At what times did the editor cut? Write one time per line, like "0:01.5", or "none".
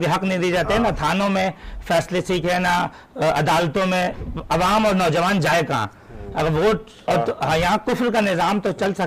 0:07.1